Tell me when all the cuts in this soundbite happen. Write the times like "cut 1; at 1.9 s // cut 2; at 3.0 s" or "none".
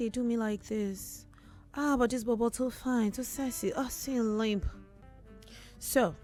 none